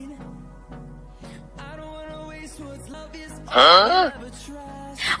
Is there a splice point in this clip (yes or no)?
yes